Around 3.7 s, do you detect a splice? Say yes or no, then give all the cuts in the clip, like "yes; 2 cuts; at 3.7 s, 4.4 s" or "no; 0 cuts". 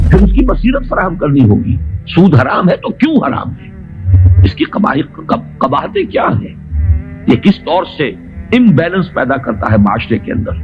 no; 0 cuts